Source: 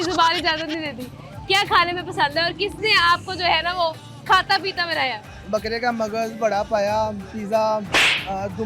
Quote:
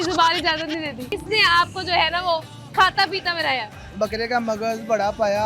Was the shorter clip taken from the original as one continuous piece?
no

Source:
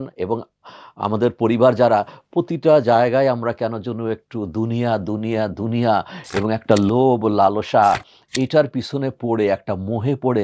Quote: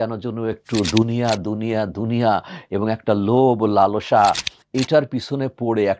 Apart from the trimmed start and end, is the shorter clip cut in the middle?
no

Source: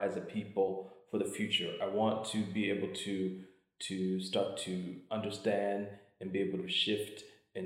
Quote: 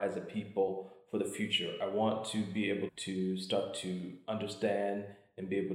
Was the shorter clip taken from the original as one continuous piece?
no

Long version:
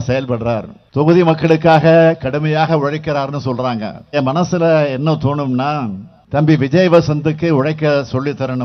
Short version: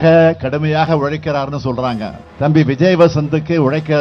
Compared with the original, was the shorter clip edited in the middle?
yes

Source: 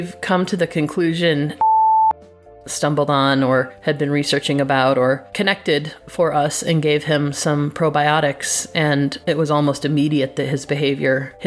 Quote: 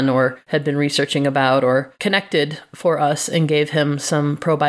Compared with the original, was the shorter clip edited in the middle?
no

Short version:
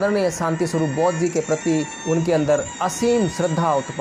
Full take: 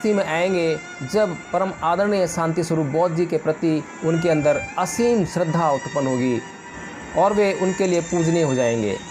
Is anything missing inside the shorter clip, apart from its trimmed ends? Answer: no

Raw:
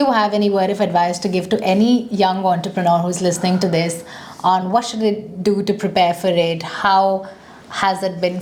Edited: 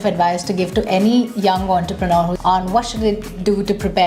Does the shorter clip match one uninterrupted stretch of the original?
no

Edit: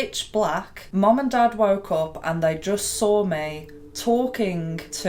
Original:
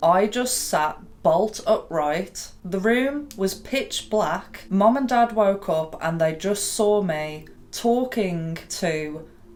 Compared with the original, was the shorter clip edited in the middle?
no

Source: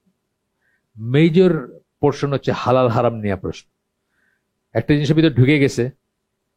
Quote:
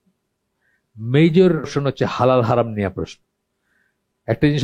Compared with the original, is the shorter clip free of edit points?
no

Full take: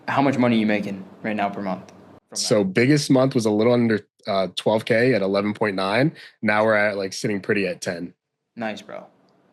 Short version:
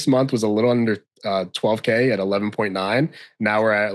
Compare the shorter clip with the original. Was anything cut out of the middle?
no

